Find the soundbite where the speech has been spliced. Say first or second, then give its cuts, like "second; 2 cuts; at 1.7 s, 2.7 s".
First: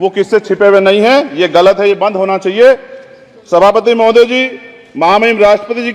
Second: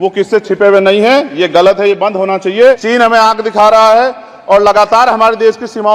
second; 1 cut; at 2.8 s